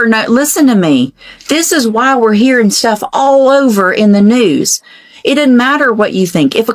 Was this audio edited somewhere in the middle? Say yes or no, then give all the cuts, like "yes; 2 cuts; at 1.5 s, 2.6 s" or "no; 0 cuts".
no; 0 cuts